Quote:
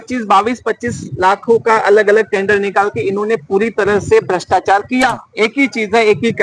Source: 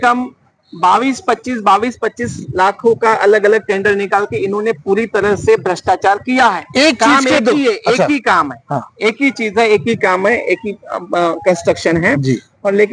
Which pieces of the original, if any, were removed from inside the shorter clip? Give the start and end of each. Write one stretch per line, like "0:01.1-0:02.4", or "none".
0:06.6-0:08.9